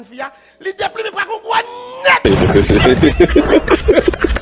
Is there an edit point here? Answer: yes; 1 cut; at 2.2 s

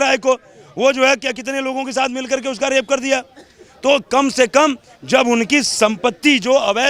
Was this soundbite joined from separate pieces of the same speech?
no; 0 cuts

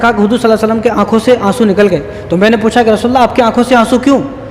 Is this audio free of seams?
yes; 0 cuts

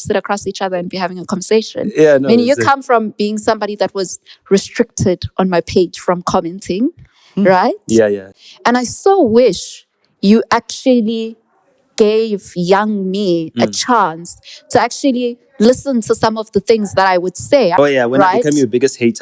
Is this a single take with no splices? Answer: no; 2 cuts; at 8.3 s, 17.8 s

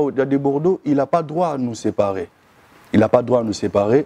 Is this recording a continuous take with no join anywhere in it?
yes; 0 cuts

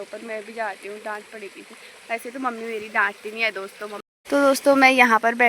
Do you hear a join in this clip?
yes; 1 cut; at 4.0 s

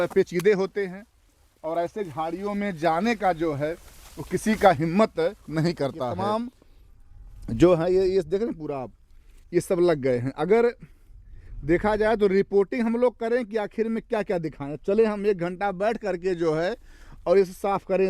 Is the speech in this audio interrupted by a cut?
yes; 1 cut; at 6.1 s

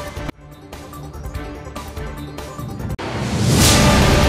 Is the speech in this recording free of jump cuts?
no; 1 cut; at 3.0 s

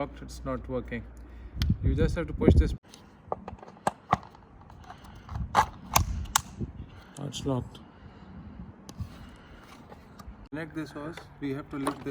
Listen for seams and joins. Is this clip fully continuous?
no; 2 cuts; at 2.8 s, 10.5 s

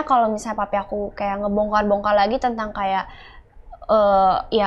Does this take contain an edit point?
no; 0 cuts

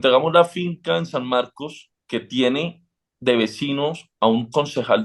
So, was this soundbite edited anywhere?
no; 0 cuts

